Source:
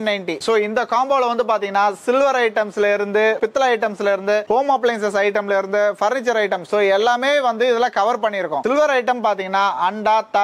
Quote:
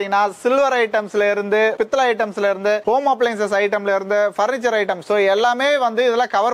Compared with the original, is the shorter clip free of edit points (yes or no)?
yes